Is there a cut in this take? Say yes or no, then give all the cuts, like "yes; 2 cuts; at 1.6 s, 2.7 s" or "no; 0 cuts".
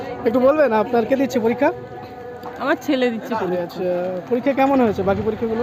no; 0 cuts